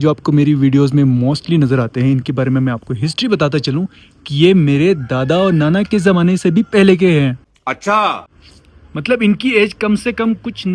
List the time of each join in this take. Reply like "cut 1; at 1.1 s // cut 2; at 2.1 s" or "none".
none